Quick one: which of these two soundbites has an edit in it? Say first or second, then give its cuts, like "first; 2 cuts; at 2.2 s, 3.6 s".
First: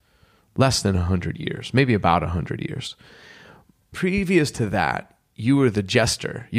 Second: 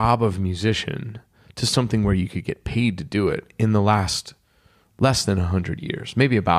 first; 1 cut; at 3.9 s